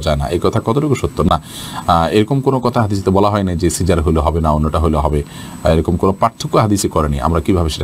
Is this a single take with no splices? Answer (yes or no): yes